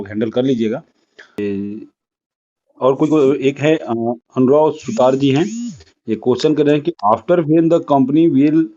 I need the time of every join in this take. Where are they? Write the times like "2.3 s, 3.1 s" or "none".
1.4 s